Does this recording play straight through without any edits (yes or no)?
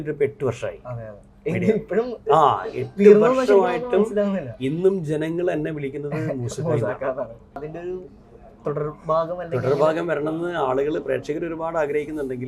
no